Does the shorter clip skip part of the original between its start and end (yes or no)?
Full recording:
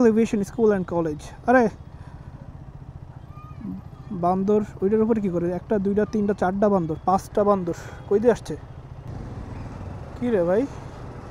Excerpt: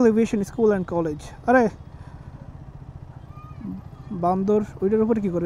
no